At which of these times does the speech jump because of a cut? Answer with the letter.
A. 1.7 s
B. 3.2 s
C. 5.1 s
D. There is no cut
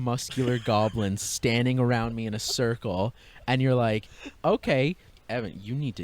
C